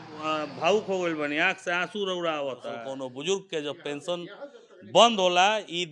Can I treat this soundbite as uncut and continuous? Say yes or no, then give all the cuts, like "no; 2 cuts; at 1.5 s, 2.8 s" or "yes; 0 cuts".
no; 1 cut; at 2.8 s